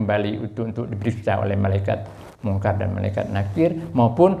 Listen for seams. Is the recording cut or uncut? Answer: uncut